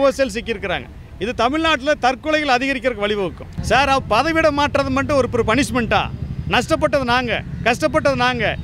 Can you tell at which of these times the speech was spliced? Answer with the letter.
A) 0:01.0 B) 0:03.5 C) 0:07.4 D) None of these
B